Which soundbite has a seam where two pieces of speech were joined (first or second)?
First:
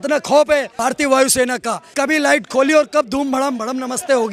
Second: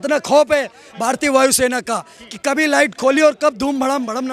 first